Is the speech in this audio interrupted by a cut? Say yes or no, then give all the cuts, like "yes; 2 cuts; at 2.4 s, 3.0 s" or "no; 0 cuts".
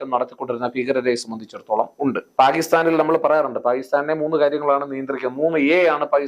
yes; 1 cut; at 2.2 s